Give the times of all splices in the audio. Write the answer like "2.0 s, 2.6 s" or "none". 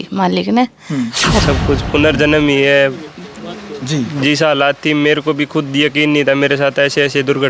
1.4 s